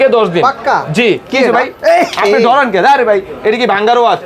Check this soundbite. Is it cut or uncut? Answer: cut